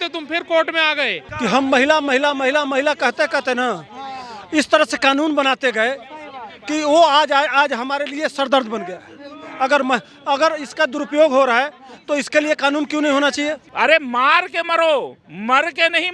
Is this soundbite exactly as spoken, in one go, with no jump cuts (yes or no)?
no